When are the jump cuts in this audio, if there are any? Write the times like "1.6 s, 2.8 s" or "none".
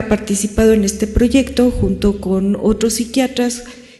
1.0 s